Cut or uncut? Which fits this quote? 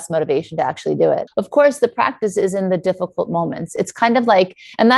cut